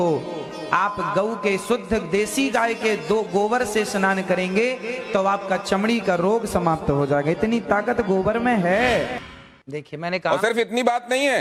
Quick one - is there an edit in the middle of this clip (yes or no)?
no